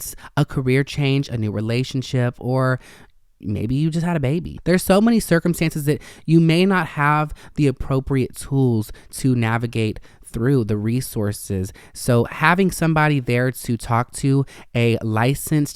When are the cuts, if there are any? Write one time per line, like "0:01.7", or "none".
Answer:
0:04.5